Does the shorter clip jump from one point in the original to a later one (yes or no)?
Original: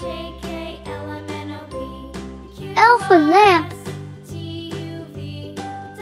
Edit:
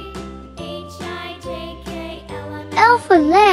no